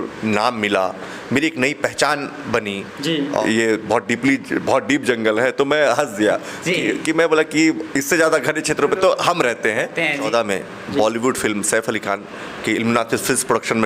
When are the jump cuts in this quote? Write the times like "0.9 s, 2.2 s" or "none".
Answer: 3.4 s, 10.2 s